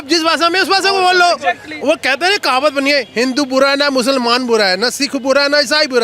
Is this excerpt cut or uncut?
uncut